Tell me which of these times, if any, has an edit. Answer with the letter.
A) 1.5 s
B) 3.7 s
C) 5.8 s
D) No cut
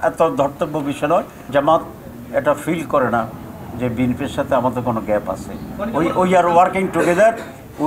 A